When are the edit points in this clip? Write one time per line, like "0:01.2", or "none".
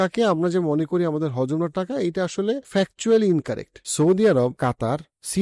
0:02.6
0:03.8